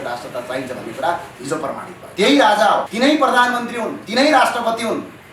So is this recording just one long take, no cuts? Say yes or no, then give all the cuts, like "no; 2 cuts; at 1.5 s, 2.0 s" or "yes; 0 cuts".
no; 2 cuts; at 2.0 s, 2.9 s